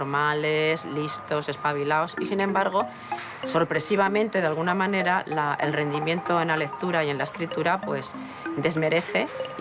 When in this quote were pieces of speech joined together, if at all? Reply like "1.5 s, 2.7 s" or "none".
none